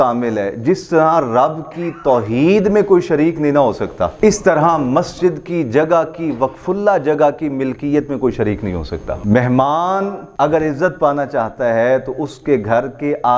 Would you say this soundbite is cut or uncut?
cut